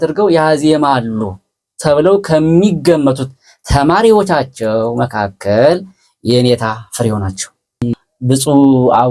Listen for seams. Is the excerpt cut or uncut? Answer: cut